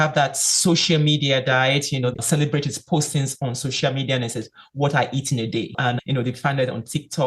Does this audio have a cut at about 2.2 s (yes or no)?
yes